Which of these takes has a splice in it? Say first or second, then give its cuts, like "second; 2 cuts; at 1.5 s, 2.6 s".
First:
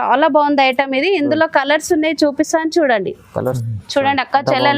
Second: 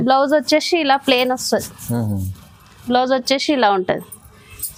first; 1 cut; at 3.6 s